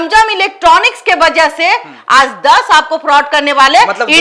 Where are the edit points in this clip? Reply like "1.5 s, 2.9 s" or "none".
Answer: none